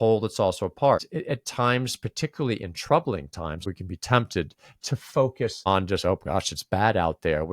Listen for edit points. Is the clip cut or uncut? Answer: cut